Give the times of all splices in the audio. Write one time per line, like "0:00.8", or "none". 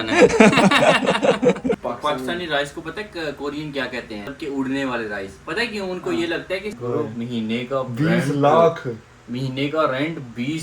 0:01.8
0:04.3
0:06.8